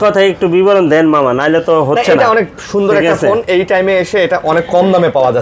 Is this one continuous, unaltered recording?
yes; 0 cuts

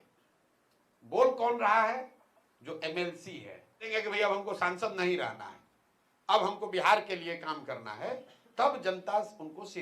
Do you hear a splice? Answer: yes; 1 cut; at 3.9 s

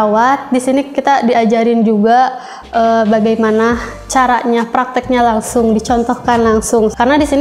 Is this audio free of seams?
yes; 0 cuts

